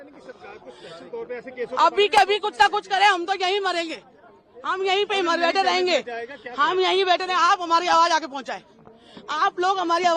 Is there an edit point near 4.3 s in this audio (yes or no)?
no